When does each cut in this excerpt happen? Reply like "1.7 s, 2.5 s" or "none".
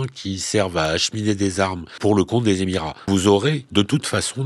2.0 s, 2.9 s, 3.6 s